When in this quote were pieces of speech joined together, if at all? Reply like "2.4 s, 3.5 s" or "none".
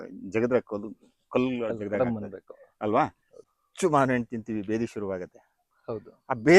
3.6 s